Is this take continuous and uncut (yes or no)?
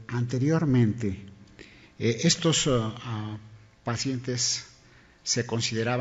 yes